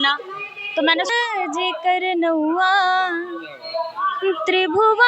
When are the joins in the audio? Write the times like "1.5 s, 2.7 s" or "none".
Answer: 1.1 s

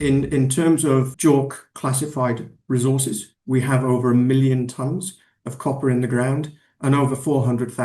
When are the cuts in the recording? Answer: 1.1 s

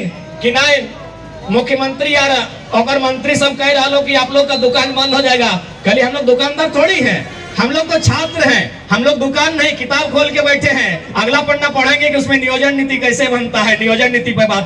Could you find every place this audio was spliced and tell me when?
none

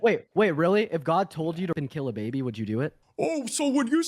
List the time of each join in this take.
3.0 s

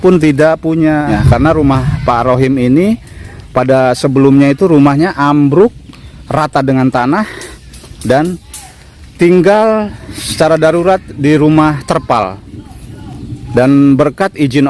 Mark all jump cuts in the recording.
1.1 s

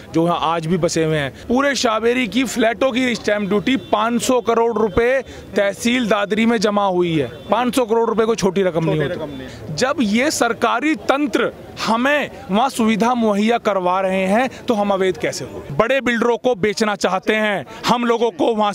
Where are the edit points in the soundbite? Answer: 1.4 s, 9.6 s, 15.6 s

